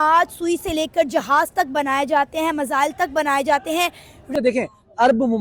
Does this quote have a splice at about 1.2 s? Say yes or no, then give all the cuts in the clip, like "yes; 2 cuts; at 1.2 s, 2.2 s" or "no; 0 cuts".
no; 1 cut; at 4.3 s